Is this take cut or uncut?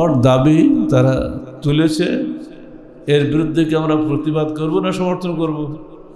uncut